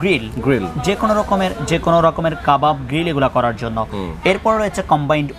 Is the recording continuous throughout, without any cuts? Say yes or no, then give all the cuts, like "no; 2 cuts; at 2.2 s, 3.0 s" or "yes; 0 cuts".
yes; 0 cuts